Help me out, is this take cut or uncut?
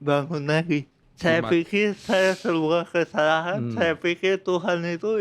cut